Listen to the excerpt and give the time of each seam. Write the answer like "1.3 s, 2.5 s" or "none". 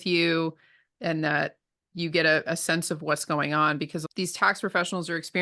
4.0 s

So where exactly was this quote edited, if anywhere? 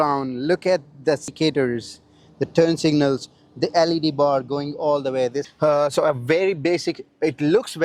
1.3 s, 5.4 s

